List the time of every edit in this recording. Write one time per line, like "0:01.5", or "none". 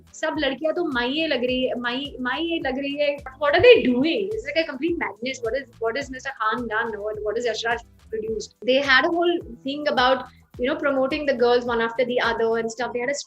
0:03.3
0:08.5